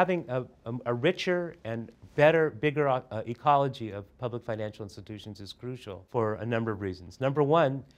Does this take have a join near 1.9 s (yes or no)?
yes